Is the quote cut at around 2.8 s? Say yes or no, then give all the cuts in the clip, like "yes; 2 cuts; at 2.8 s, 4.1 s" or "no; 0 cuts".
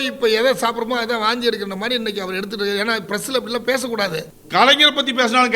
no; 1 cut; at 4.4 s